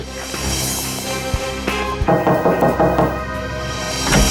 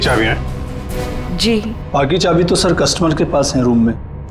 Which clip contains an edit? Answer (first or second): first